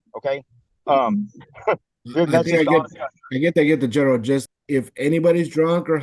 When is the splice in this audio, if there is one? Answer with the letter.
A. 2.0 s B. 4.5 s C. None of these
B